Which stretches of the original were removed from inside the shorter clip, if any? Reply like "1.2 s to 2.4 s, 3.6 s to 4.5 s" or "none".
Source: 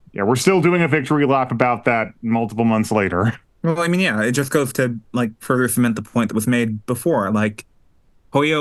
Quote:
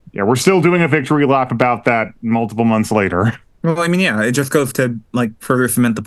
none